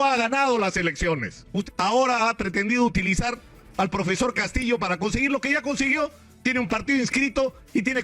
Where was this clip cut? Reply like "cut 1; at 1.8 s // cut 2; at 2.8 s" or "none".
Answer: cut 1; at 1.7 s